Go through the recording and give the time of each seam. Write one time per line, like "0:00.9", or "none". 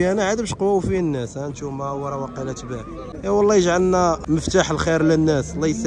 0:03.1
0:04.2